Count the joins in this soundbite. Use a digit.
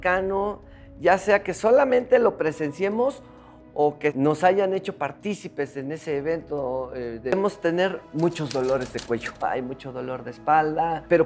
1